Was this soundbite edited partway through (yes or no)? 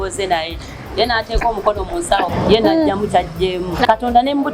yes